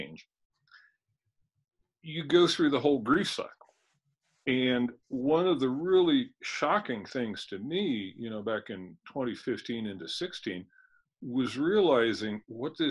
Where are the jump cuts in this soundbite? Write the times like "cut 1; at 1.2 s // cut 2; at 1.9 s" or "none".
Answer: none